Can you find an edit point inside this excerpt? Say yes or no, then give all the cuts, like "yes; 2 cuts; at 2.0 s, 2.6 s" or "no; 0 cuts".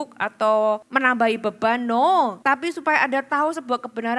yes; 2 cuts; at 0.9 s, 2.4 s